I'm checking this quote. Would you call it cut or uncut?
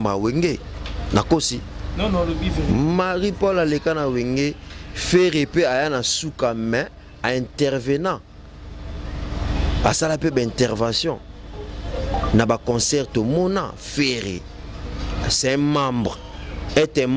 uncut